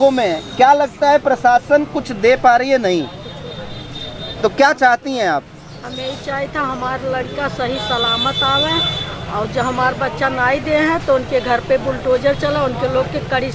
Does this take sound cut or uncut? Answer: uncut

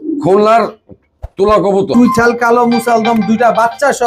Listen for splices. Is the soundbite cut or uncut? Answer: cut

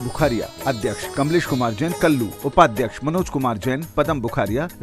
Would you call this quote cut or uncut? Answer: cut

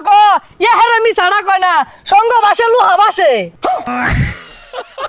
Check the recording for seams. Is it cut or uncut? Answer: cut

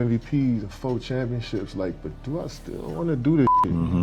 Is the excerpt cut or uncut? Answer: uncut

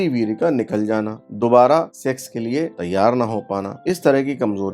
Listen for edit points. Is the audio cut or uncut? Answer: cut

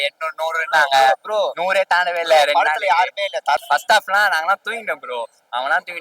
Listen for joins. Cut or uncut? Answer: cut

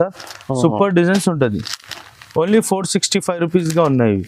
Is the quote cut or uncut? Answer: uncut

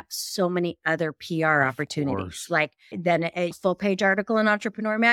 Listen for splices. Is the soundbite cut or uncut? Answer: uncut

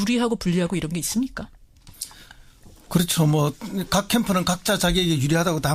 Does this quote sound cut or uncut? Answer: uncut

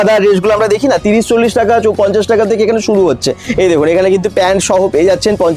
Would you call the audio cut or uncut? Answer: uncut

